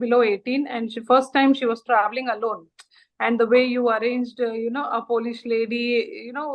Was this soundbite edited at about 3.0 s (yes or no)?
yes